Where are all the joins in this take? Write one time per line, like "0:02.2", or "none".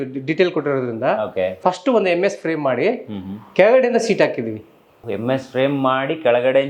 0:01.6
0:05.1